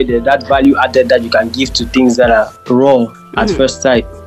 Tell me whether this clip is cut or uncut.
cut